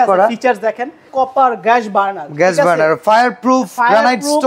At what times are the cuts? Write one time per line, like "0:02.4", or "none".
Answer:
0:01.1